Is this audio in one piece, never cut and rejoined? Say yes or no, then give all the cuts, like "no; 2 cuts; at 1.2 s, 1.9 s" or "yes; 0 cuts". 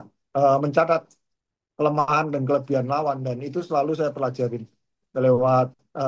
yes; 0 cuts